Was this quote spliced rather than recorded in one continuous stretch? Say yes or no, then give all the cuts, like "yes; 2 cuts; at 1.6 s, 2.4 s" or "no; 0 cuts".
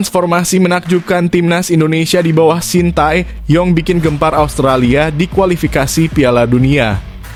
no; 0 cuts